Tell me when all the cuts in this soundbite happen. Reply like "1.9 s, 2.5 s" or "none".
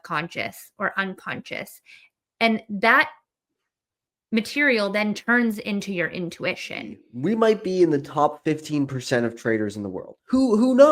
7.0 s